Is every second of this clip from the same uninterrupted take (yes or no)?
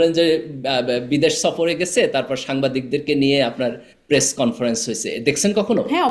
yes